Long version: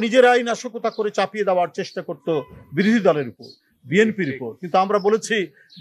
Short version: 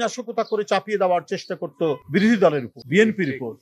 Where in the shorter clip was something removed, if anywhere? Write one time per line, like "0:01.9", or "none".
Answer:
0:02.0
0:02.7